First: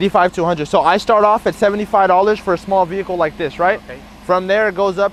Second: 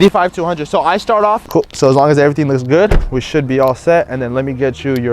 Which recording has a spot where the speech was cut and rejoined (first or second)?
second